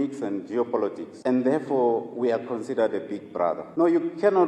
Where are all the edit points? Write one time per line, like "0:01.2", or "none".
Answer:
0:01.1
0:03.6